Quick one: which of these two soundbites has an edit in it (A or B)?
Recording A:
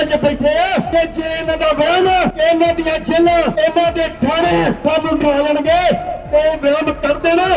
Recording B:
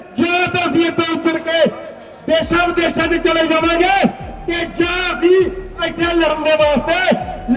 A